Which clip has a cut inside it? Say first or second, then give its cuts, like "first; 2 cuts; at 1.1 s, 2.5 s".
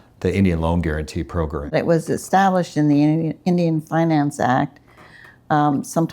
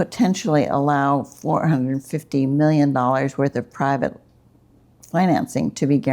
first; 1 cut; at 1.7 s